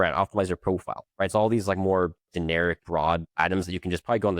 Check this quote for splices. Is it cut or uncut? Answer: cut